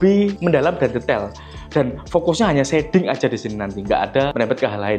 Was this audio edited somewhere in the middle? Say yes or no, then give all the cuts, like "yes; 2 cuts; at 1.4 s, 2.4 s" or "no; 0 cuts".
no; 0 cuts